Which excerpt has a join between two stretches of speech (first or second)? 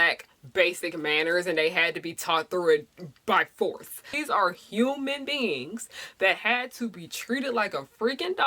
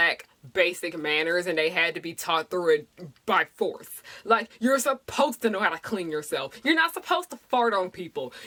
first